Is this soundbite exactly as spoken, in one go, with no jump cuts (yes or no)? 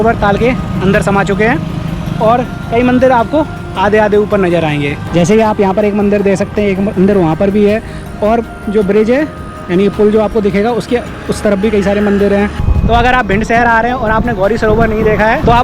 yes